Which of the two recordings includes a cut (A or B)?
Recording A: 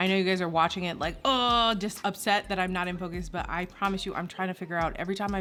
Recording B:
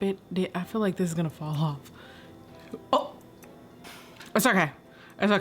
B